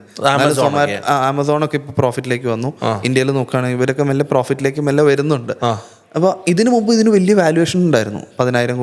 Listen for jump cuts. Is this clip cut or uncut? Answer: uncut